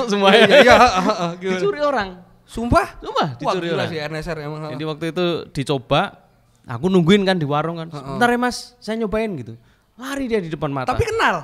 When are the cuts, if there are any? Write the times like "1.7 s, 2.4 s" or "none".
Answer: none